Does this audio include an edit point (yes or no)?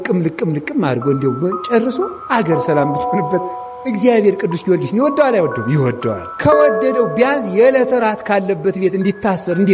yes